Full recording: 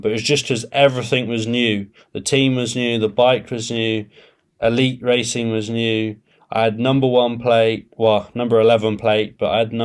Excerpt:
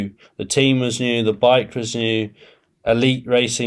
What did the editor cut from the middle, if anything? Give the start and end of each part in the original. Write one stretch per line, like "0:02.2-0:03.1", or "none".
none